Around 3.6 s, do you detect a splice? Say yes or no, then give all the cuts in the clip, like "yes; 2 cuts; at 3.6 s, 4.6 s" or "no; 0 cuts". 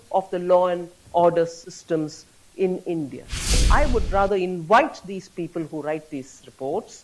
yes; 1 cut; at 3.6 s